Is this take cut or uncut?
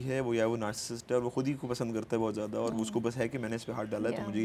uncut